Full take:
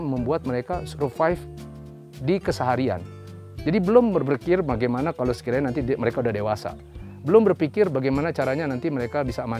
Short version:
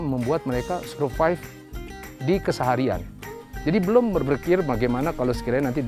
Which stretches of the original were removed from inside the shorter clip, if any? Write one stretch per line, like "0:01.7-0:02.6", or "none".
none